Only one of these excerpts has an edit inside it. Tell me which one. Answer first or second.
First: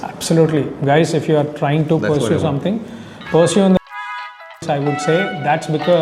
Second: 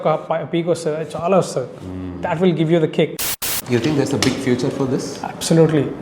second